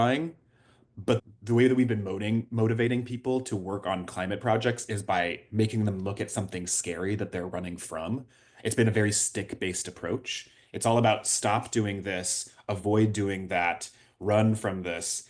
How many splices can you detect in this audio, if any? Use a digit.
1